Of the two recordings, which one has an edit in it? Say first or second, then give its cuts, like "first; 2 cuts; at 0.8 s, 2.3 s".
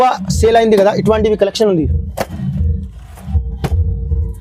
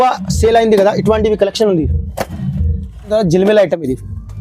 second; 1 cut; at 3.1 s